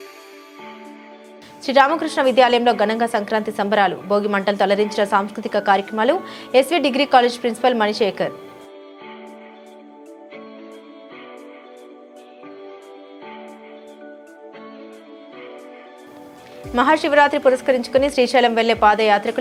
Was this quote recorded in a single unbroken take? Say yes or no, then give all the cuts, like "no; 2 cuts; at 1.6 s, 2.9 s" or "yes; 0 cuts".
yes; 0 cuts